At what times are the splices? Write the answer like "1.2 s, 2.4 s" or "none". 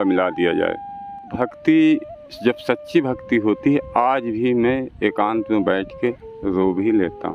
1.3 s